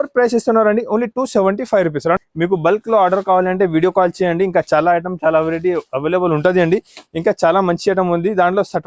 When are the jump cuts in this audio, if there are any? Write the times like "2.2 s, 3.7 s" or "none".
2.2 s